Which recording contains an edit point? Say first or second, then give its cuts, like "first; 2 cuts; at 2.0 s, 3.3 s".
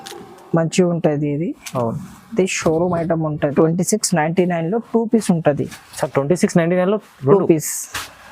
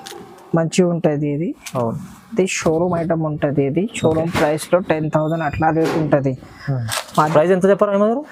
first; 1 cut; at 3.5 s